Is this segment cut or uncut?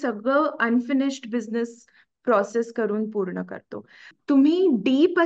cut